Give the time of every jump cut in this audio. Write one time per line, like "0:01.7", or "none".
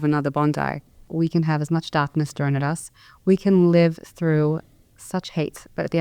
0:01.1